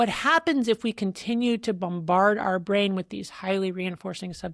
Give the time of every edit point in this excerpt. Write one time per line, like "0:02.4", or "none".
none